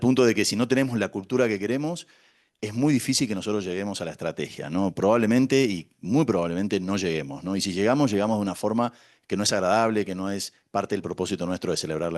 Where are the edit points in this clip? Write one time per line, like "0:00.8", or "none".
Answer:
none